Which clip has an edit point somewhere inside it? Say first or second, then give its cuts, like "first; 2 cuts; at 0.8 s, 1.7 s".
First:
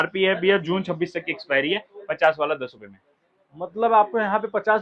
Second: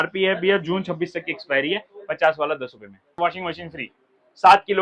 second; 1 cut; at 3.1 s